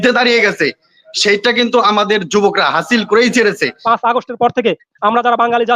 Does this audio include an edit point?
yes; 1 cut; at 3.8 s

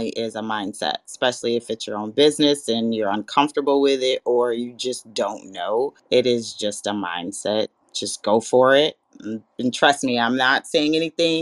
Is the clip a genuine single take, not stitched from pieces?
no; 1 cut; at 6.0 s

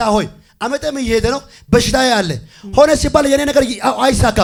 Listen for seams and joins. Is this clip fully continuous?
yes; 0 cuts

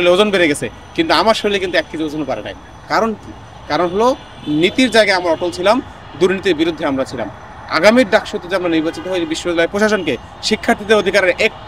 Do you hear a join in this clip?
no; 0 cuts

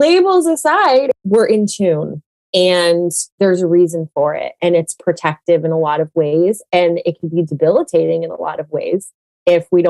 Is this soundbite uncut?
no; 1 cut; at 1.2 s

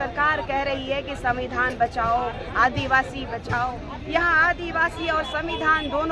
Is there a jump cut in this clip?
no; 0 cuts

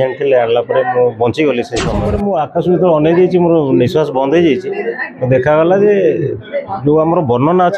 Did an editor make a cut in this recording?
yes; 1 cut; at 2.0 s

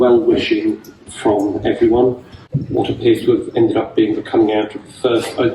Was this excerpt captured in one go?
no; 1 cut; at 2.5 s

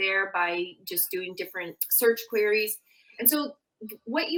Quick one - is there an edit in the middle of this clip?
no; 0 cuts

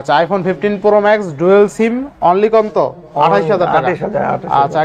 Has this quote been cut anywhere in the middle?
no; 0 cuts

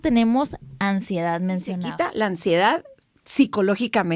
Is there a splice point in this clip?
yes; 1 cut; at 1.9 s

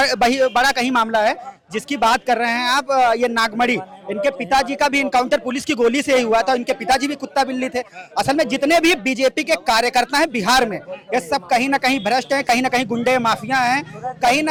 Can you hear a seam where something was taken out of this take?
no; 0 cuts

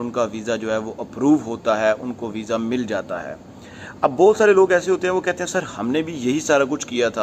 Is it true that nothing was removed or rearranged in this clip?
yes; 0 cuts

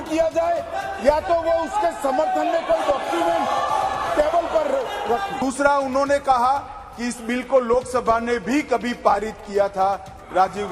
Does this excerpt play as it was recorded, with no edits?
no; 1 cut; at 5.4 s

